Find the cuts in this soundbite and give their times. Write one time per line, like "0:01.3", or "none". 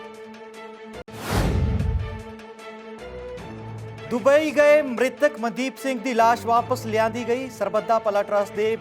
0:01.0
0:04.0